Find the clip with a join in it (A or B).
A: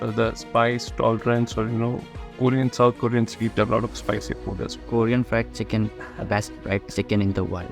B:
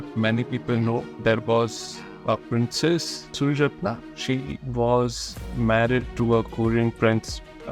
A